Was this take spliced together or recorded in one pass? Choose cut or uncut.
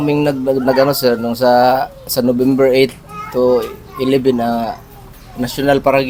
uncut